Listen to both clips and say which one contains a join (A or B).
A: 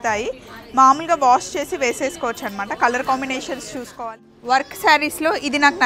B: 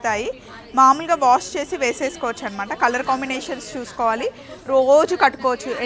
A